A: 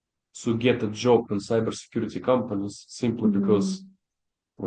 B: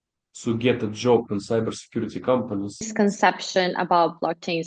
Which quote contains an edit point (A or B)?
B